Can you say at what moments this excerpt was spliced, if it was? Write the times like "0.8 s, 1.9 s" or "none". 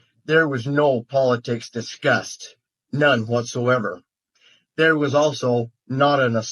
none